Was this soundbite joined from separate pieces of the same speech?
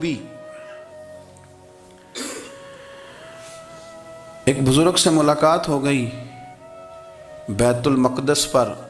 no; 0 cuts

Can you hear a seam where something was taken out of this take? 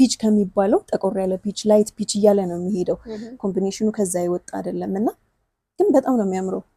no; 0 cuts

